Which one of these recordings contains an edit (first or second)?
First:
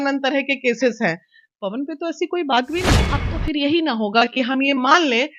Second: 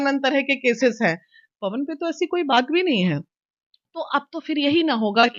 first